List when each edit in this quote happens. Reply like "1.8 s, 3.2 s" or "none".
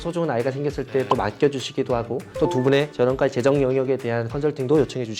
none